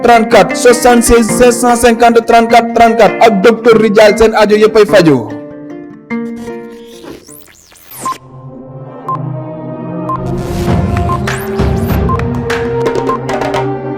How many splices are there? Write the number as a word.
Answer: one